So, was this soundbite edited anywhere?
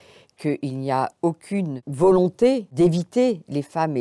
yes; 2 cuts; at 1.8 s, 2.7 s

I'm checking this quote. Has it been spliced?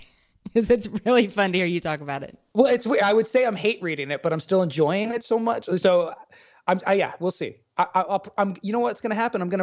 no; 0 cuts

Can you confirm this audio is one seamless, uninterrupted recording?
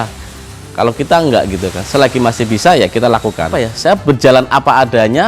no; 1 cut; at 3.5 s

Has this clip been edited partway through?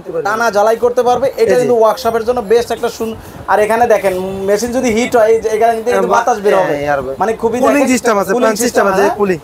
no; 0 cuts

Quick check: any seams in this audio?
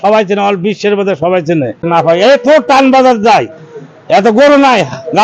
yes; 1 cut; at 1.8 s

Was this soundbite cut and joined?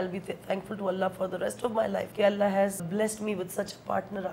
yes; 2 cuts; at 2.1 s, 2.9 s

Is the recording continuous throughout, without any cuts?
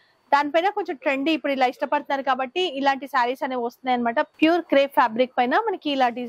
no; 1 cut; at 4.3 s

